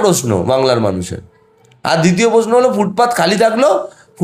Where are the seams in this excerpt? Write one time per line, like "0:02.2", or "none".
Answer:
none